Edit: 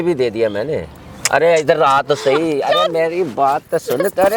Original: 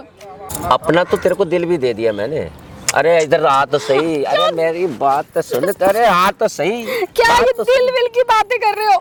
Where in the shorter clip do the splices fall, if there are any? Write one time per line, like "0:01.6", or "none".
none